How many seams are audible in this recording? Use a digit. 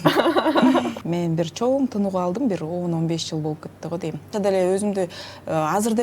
2